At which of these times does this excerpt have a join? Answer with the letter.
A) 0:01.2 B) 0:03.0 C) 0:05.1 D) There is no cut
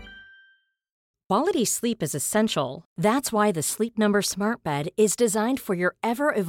A